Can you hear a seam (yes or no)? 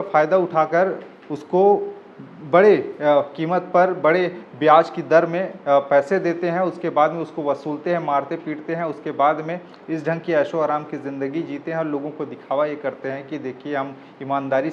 no